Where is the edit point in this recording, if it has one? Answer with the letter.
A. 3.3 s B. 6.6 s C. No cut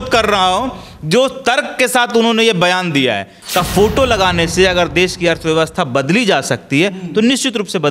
A